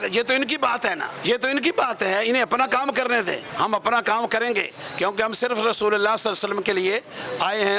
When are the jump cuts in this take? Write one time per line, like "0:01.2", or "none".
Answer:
0:01.1
0:03.5